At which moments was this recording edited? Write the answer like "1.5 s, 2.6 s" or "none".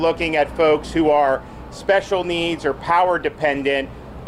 none